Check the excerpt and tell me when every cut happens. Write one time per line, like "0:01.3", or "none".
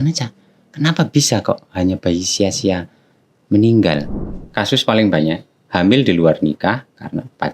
0:04.1